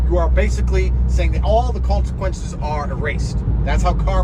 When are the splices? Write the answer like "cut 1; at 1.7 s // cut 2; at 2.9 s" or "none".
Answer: none

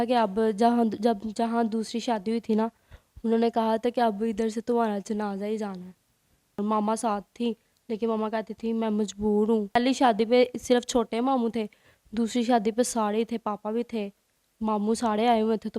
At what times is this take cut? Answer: cut 1; at 6.6 s // cut 2; at 9.7 s

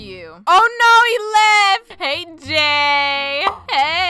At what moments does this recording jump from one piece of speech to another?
cut 1; at 1.9 s

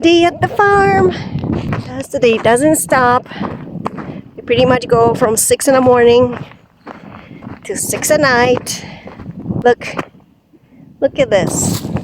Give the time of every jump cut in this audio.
cut 1; at 1.7 s // cut 2; at 9.6 s

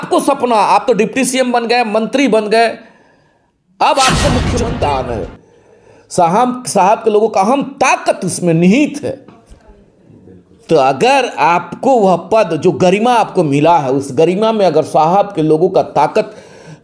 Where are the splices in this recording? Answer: cut 1; at 4.5 s

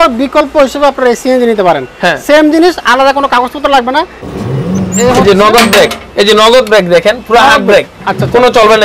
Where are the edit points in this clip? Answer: cut 1; at 4.2 s

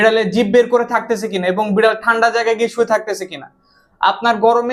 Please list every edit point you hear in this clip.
none

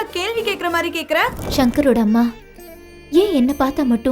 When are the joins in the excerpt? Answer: cut 1; at 1.4 s

